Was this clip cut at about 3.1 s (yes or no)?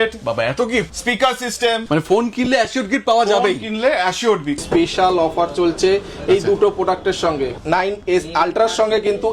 no